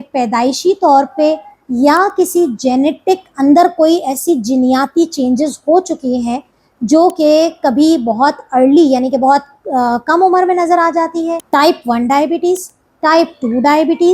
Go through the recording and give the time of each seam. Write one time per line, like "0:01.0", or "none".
0:11.4